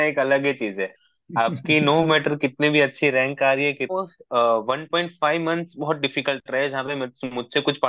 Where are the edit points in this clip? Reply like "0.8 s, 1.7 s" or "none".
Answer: 3.9 s